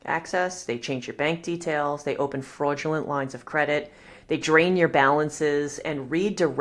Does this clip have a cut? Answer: no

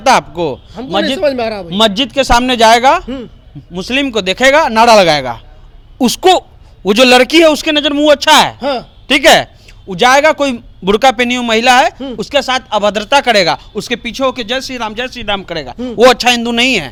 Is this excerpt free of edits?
yes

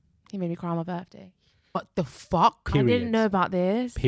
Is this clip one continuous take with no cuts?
no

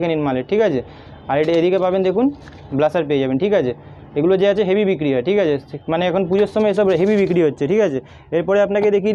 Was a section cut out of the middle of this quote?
no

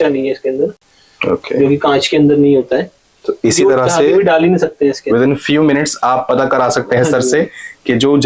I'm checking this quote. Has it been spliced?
no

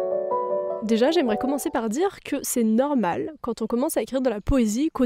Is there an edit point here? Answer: no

